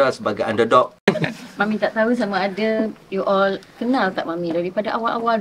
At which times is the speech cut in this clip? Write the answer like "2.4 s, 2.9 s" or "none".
1.0 s